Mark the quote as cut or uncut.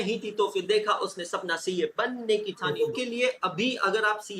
cut